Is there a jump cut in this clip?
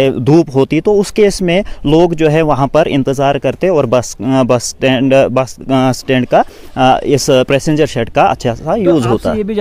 no; 0 cuts

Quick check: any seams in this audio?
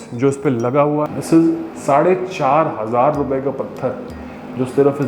yes; 1 cut; at 1.1 s

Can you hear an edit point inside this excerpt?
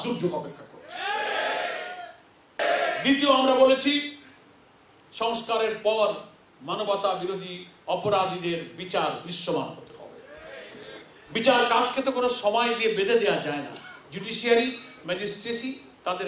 yes; 1 cut; at 2.6 s

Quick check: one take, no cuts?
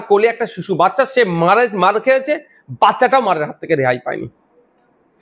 yes; 0 cuts

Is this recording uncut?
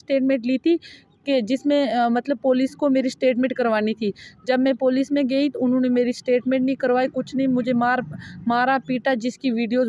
yes; 0 cuts

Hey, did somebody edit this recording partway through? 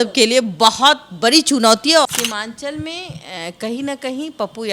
yes; 1 cut; at 2.0 s

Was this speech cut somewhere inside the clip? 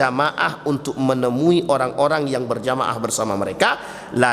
no; 0 cuts

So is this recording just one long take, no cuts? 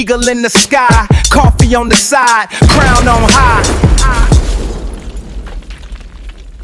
yes; 0 cuts

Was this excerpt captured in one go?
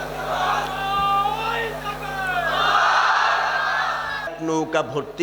no; 1 cut; at 4.3 s

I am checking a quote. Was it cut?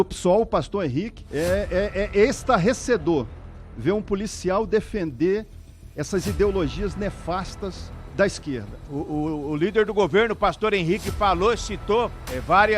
yes; 2 cuts; at 1.2 s, 8.7 s

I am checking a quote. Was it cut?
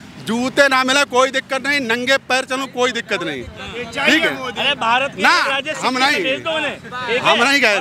no; 0 cuts

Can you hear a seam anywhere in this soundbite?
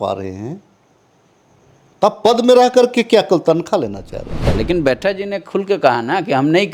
yes; 1 cut; at 4.5 s

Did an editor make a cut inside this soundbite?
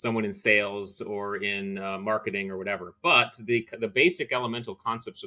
no; 0 cuts

